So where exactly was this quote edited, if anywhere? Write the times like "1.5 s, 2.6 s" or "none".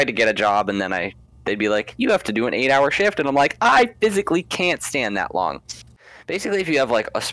6.0 s